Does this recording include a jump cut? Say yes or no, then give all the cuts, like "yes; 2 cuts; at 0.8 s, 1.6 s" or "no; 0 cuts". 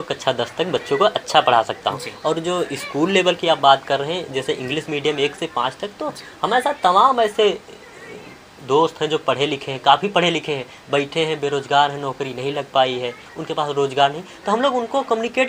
no; 0 cuts